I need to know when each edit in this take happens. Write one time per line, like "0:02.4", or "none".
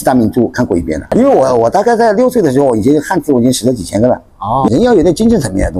0:01.0
0:04.7